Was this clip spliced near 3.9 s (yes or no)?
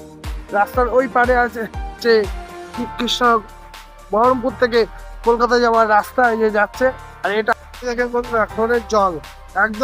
no